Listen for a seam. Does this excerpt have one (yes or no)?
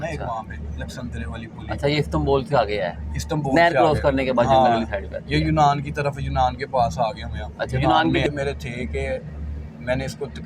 yes